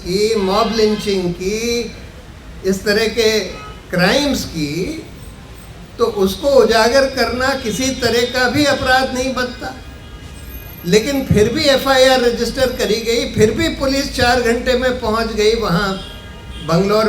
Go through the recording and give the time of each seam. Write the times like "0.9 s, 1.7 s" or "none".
none